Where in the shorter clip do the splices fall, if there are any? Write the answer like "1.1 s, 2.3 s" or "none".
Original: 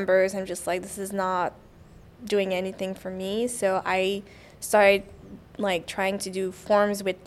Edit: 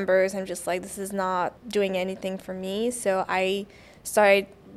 1.6 s